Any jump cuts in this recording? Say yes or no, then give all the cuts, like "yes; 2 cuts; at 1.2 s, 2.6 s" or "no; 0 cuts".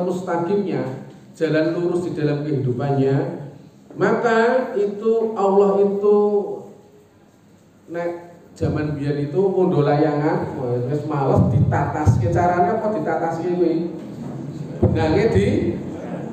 no; 0 cuts